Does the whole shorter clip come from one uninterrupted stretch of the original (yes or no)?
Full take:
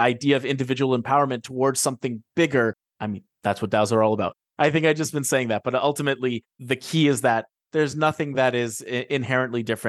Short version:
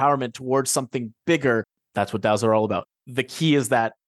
no